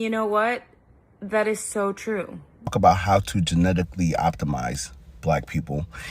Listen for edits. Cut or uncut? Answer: cut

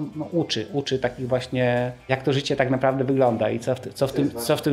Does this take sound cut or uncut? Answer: cut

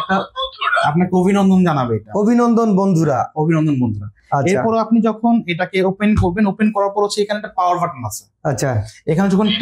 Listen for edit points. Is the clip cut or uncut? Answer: uncut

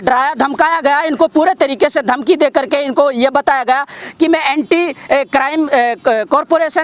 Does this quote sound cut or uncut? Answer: uncut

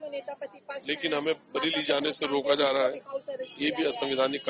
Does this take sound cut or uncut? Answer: uncut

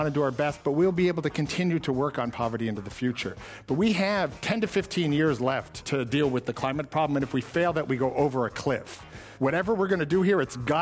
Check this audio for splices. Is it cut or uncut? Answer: cut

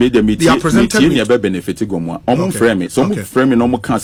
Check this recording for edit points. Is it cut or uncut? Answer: uncut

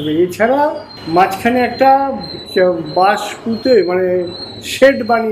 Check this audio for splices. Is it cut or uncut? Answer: cut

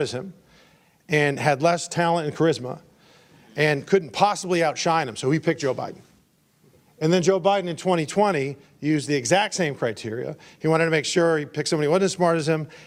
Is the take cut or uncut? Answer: uncut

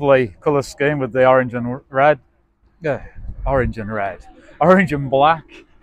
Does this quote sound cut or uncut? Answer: uncut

